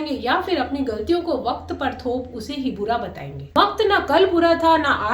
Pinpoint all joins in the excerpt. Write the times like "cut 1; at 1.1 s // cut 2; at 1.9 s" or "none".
cut 1; at 3.3 s